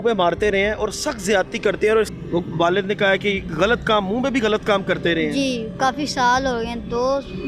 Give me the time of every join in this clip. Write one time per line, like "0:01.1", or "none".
0:02.1